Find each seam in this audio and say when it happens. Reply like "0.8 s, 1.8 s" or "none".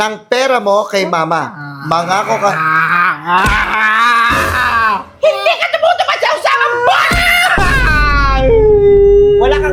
none